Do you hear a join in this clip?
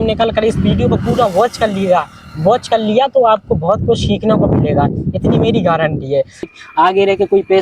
yes; 1 cut; at 6.5 s

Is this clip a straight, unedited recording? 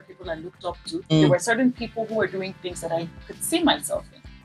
no; 1 cut; at 1.1 s

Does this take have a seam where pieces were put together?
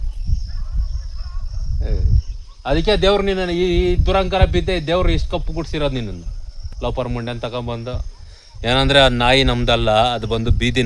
no; 0 cuts

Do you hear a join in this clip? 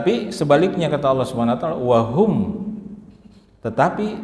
no; 0 cuts

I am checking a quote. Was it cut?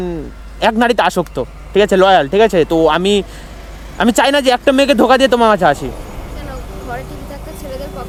no; 0 cuts

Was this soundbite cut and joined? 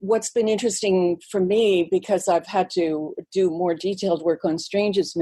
no; 0 cuts

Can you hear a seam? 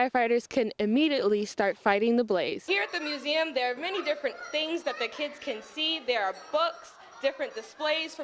yes; 1 cut; at 2.6 s

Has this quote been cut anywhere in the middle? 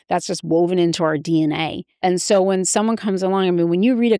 yes; 1 cut; at 2.0 s

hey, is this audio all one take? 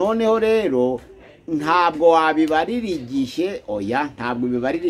yes; 0 cuts

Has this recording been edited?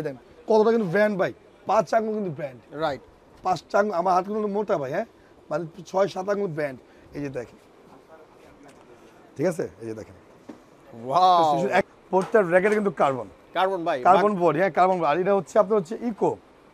yes; 1 cut; at 11.9 s

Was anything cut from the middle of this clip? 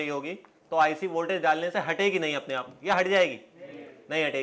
no; 0 cuts

